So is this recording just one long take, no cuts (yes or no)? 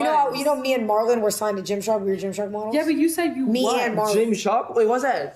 yes